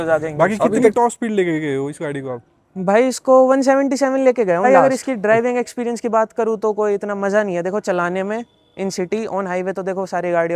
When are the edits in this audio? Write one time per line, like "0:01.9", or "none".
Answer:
0:00.9
0:04.7